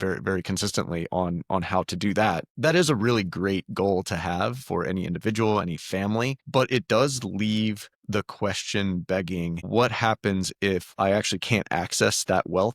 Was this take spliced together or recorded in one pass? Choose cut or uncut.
cut